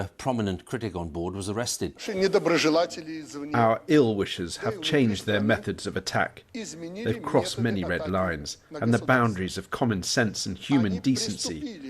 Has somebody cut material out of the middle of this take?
yes; 1 cut; at 2.1 s

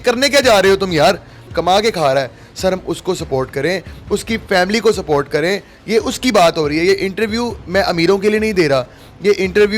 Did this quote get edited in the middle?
yes; 1 cut; at 1.5 s

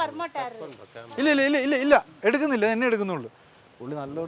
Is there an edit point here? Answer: no; 0 cuts

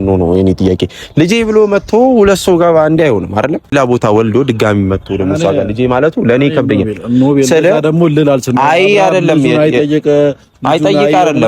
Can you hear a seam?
yes; 1 cut; at 3.7 s

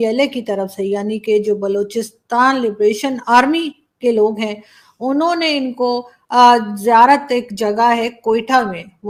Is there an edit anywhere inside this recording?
no; 0 cuts

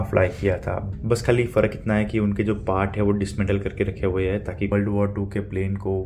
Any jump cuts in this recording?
yes; 2 cuts; at 0.9 s, 4.7 s

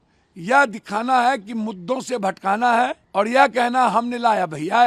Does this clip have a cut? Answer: yes; 1 cut; at 3.0 s

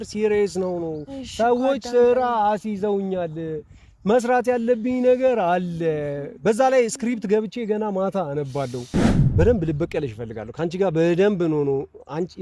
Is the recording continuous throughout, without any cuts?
no; 1 cut; at 9.1 s

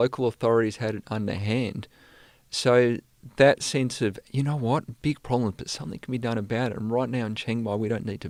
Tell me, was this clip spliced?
no; 0 cuts

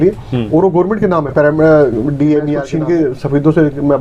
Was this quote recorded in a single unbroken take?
no; 1 cut; at 2.6 s

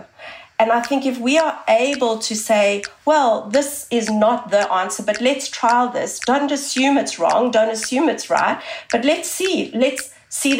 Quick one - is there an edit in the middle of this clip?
no; 0 cuts

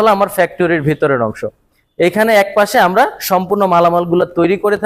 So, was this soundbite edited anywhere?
no; 0 cuts

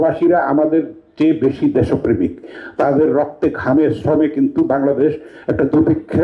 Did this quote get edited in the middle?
no; 0 cuts

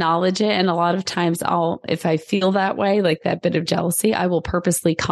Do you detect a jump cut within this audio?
no; 0 cuts

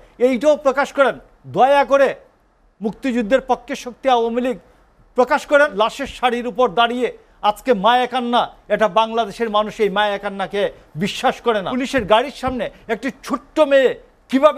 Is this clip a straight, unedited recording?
no; 2 cuts; at 5.7 s, 11.7 s

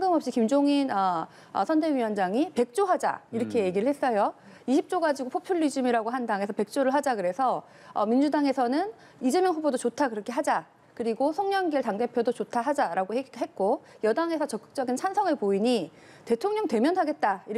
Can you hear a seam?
no; 0 cuts

